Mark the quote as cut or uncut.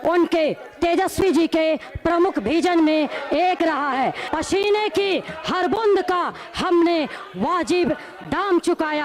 cut